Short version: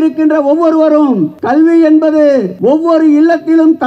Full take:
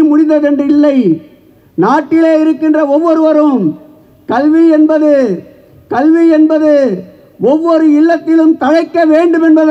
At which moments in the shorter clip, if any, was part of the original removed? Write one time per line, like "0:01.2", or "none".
0:01.3
0:02.5